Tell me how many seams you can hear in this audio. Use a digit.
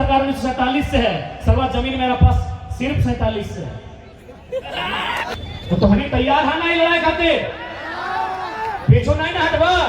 1